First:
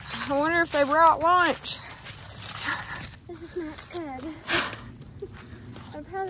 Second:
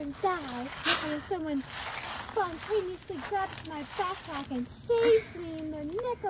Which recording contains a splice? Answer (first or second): first